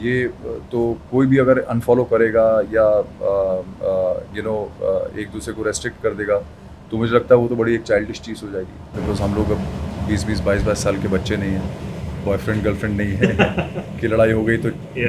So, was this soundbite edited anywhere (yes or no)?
no